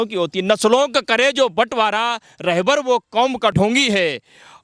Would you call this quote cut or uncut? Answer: cut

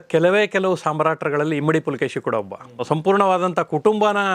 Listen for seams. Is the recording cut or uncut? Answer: cut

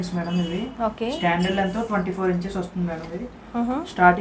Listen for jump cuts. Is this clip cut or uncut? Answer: uncut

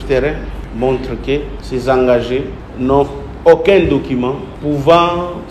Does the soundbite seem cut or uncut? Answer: uncut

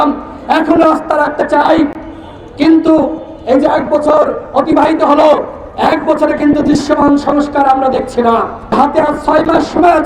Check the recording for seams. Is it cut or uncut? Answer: cut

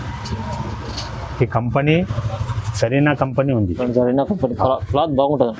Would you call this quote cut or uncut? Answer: uncut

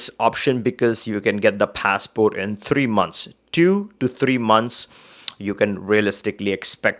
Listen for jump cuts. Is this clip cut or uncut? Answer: uncut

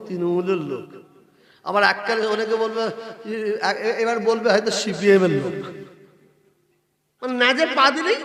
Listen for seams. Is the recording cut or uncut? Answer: uncut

